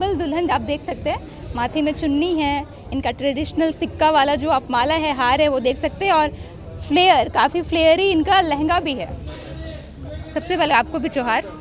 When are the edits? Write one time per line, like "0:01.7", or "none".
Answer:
none